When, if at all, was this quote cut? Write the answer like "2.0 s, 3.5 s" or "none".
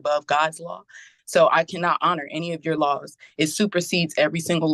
none